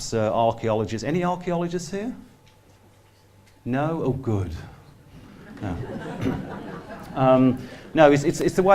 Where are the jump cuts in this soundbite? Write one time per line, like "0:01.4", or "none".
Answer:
0:04.1